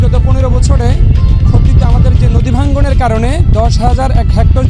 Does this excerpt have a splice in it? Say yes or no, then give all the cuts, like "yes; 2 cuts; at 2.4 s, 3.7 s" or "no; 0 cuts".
no; 0 cuts